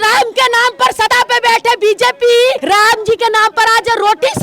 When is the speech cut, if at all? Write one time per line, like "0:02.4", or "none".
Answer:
0:01.1
0:02.6